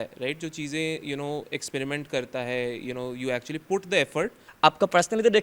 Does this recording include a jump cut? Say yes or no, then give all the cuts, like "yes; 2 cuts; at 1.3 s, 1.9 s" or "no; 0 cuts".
yes; 1 cut; at 4.4 s